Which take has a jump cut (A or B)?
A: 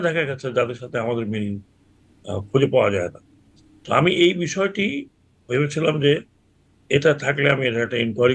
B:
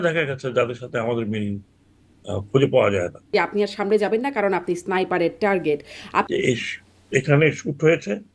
B